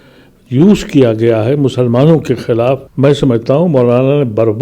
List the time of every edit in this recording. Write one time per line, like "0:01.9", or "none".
0:02.9